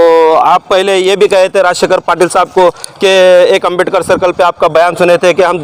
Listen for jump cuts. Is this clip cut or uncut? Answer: uncut